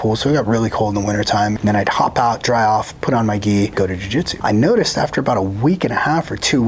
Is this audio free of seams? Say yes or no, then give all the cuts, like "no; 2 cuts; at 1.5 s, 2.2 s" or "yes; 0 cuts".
no; 2 cuts; at 1.5 s, 4.0 s